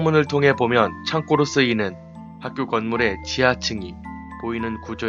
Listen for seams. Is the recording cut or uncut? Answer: uncut